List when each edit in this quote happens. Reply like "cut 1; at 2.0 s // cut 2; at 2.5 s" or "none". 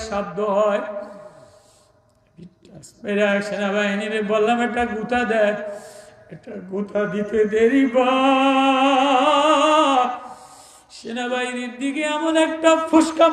none